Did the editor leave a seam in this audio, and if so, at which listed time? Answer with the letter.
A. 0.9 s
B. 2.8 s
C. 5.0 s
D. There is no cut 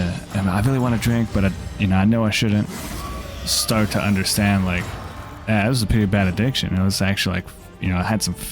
B